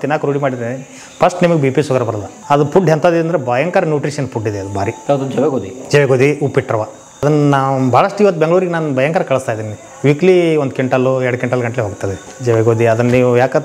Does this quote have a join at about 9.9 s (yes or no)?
no